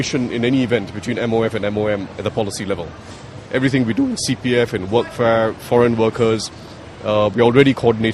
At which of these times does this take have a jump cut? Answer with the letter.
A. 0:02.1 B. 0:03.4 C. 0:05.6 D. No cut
D